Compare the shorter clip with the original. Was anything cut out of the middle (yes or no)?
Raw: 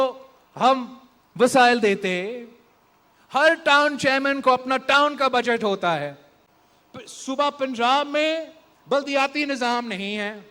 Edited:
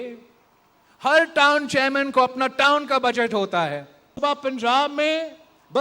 yes